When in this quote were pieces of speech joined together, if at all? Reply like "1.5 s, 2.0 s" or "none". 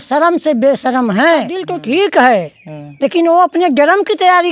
1.7 s